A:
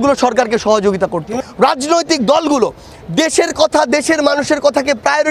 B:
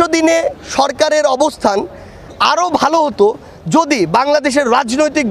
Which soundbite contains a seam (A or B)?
A